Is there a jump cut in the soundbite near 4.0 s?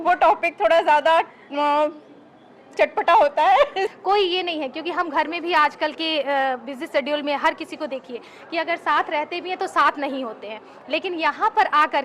yes; 1 cut; at 4.0 s

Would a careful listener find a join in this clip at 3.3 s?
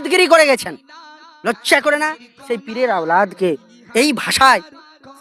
no; 0 cuts

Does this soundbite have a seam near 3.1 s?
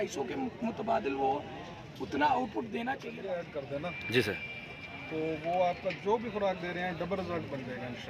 yes; 1 cut; at 3.1 s

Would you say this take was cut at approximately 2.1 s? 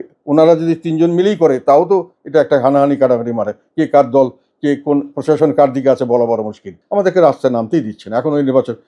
no; 1 cut; at 6.8 s

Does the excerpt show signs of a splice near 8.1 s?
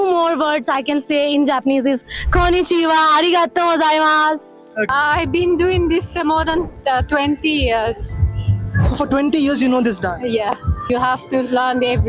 no; 2 cuts; at 4.9 s, 10.9 s

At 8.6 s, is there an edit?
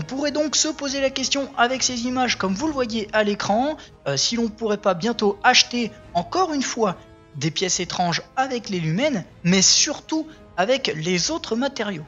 yes; 1 cut; at 8.6 s

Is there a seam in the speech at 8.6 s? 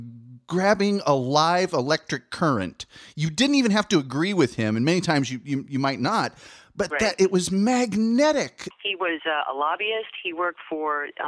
yes; 1 cut; at 8.6 s

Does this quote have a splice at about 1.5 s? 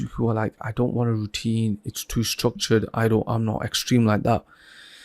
no; 0 cuts

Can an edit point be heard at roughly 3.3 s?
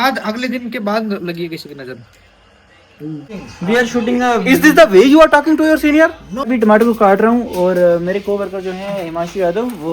yes; 2 cuts; at 3.3 s, 6.5 s

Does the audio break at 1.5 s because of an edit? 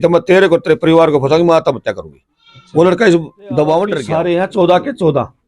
no; 1 cut; at 4.1 s

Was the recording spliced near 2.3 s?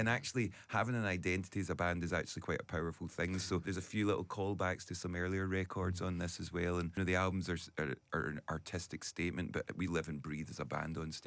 no; 2 cuts; at 3.7 s, 6.9 s

